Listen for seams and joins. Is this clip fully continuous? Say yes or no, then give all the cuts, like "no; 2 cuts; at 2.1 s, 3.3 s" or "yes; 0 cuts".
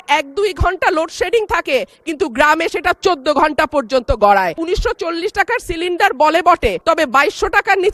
no; 2 cuts; at 4.6 s, 6.8 s